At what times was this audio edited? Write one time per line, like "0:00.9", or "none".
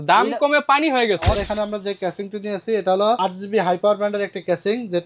0:01.4
0:03.2